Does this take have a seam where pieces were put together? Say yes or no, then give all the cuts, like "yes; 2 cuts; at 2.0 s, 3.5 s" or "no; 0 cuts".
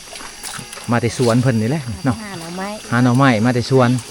no; 0 cuts